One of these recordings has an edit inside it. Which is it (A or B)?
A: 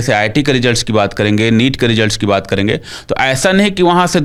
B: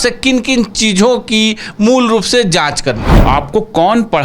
B